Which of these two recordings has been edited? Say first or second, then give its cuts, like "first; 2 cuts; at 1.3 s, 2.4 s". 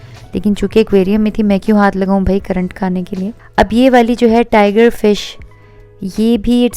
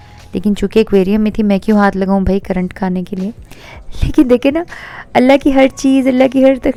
first; 1 cut; at 3.4 s